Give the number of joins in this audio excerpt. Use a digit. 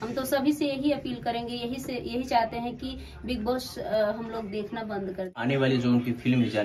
1